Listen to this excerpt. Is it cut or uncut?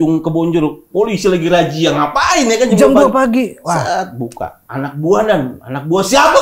uncut